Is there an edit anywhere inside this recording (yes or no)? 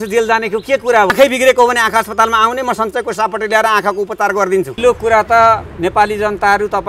yes